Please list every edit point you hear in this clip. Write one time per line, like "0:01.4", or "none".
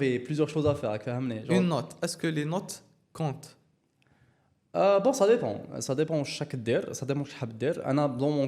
none